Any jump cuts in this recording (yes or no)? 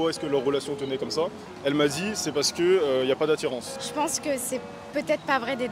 yes